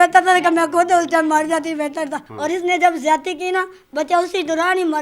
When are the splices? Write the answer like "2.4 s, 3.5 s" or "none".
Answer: 2.3 s